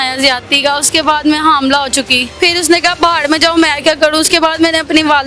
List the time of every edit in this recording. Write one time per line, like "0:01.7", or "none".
0:02.2